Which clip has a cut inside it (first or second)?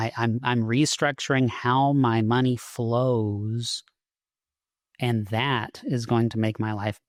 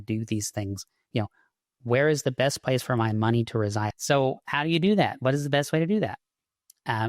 second